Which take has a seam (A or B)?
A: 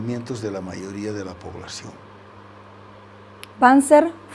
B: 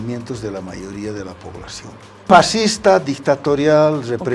B